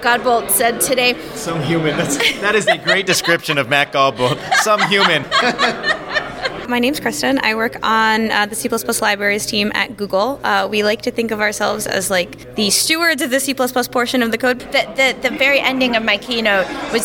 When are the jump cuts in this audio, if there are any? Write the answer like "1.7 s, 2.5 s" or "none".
5.3 s, 6.7 s, 12.4 s, 14.6 s